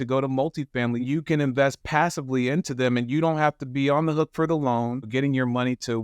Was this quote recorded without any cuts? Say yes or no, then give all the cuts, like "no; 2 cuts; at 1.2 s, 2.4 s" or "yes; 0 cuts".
no; 2 cuts; at 1.0 s, 5.1 s